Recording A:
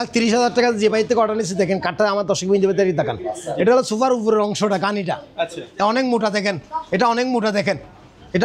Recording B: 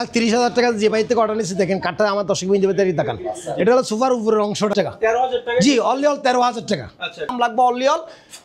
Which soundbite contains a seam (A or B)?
B